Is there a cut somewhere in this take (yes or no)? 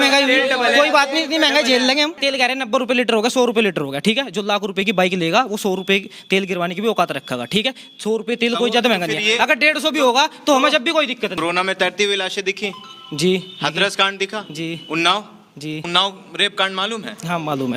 yes